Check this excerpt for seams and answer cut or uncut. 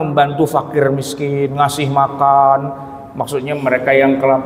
uncut